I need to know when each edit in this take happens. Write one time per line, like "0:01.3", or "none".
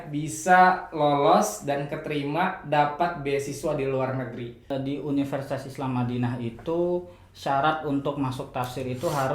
0:04.7